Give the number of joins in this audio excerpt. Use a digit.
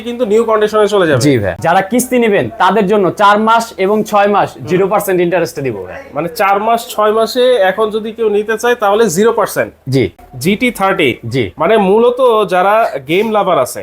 2